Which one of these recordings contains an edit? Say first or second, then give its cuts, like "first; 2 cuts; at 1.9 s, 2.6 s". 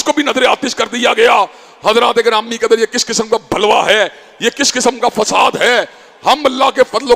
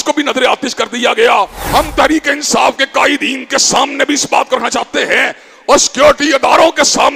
second; 1 cut; at 1.6 s